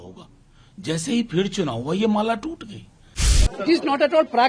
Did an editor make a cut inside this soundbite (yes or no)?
yes